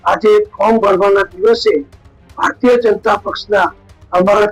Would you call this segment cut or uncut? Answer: uncut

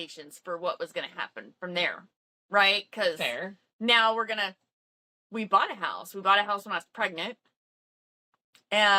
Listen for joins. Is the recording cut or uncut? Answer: uncut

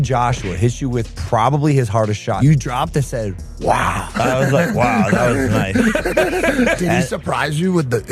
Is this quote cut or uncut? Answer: cut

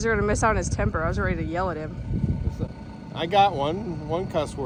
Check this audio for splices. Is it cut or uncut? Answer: uncut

